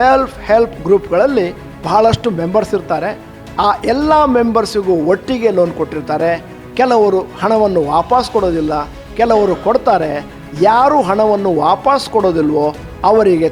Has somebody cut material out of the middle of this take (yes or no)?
no